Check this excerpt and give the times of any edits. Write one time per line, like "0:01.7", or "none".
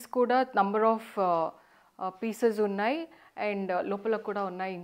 none